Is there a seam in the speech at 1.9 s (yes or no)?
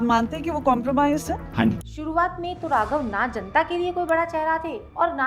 yes